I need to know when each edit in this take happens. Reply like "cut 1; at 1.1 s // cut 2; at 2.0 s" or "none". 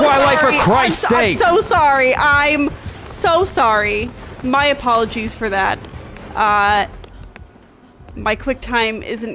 none